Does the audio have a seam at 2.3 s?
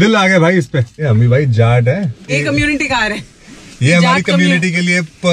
yes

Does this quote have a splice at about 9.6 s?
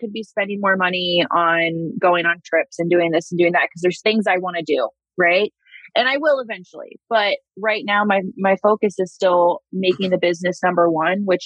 no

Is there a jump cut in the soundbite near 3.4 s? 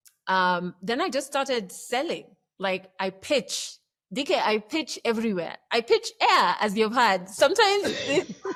no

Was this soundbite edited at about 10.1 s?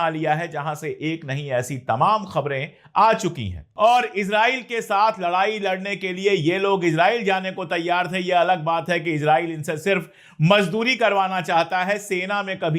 no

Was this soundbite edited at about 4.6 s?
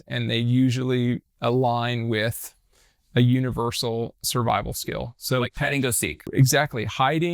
no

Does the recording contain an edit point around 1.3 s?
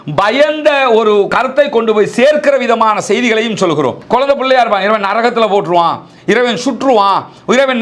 yes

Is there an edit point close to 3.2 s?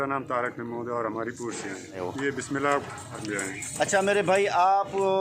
yes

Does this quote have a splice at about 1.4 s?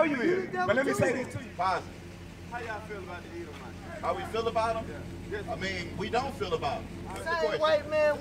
yes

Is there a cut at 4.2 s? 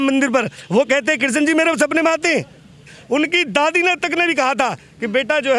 no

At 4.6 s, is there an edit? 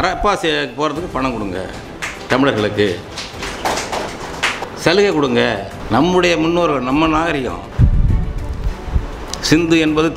yes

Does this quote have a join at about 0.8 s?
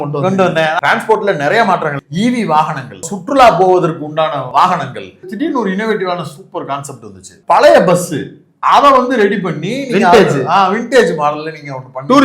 yes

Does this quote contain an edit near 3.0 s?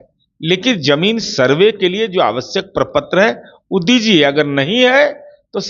no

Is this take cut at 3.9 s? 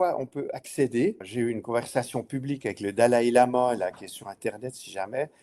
no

